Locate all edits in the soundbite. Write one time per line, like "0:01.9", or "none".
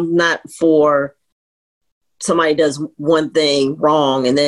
none